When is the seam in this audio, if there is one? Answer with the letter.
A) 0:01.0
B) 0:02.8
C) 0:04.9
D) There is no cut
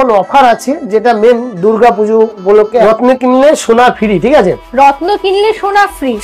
B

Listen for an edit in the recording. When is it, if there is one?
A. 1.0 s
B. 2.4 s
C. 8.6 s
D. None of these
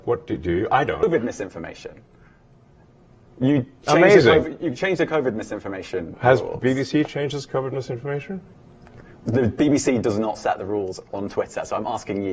A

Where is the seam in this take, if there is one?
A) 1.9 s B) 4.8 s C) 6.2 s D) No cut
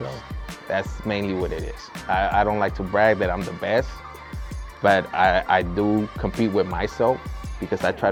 D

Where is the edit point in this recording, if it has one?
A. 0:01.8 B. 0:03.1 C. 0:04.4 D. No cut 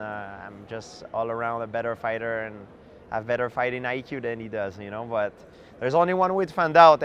D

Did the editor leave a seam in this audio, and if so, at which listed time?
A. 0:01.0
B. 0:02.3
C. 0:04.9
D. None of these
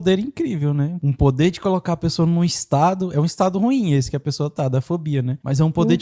A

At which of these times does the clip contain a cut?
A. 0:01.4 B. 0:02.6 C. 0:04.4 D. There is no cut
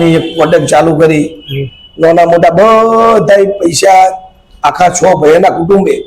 D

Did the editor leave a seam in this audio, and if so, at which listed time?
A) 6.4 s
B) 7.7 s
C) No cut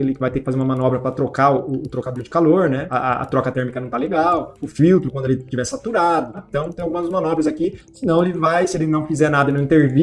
C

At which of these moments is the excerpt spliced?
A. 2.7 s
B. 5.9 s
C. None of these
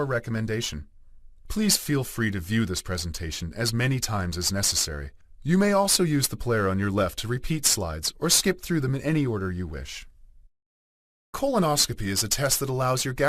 B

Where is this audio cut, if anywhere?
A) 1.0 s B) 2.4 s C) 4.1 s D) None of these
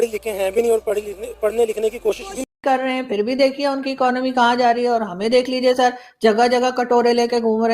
B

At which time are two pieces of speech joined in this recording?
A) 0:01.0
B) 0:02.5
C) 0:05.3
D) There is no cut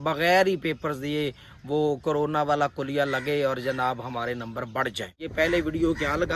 C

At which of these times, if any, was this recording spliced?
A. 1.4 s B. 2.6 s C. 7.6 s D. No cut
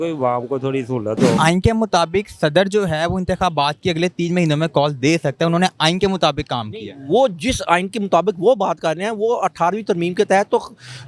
A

